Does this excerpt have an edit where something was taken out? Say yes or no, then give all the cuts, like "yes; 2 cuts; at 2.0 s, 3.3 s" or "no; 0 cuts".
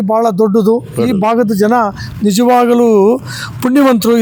no; 0 cuts